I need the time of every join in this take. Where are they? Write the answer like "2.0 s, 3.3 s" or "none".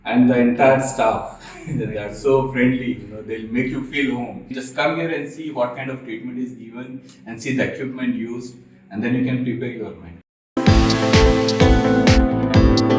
4.6 s, 10.5 s